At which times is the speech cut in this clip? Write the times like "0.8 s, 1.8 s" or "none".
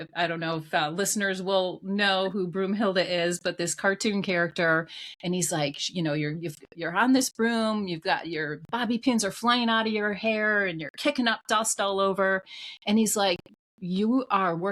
none